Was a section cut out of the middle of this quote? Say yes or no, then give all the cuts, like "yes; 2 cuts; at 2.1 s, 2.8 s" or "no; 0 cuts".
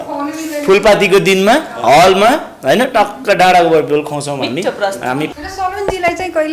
yes; 1 cut; at 5.3 s